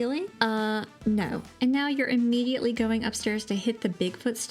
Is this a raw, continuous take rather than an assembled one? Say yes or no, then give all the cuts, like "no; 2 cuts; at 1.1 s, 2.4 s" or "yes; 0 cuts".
no; 1 cut; at 0.9 s